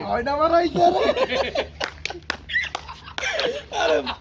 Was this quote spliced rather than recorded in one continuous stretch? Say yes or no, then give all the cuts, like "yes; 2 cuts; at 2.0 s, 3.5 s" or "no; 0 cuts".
no; 0 cuts